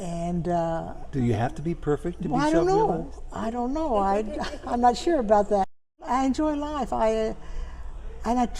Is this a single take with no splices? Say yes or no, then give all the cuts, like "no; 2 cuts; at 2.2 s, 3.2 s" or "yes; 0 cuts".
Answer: no; 1 cut; at 5.9 s